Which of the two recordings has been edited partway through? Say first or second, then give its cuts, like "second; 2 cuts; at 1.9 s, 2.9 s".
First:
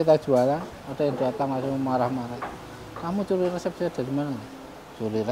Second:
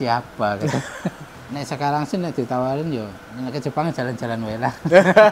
second; 2 cuts; at 1.3 s, 3.2 s